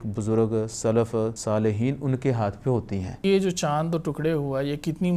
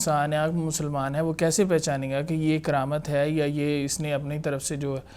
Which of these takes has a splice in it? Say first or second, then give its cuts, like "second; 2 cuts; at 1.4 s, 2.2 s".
first; 2 cuts; at 1.4 s, 3.2 s